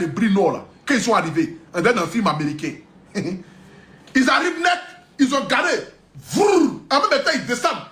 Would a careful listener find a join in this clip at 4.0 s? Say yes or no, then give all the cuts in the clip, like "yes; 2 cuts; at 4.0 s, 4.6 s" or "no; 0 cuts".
no; 0 cuts